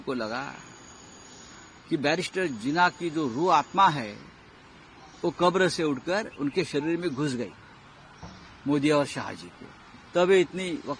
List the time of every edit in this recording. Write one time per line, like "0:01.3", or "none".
none